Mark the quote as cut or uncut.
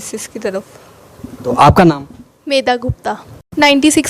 uncut